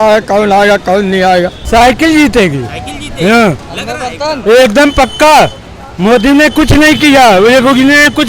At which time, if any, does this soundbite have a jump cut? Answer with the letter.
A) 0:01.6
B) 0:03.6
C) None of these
A